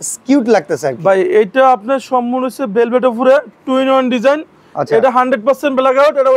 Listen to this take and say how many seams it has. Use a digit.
0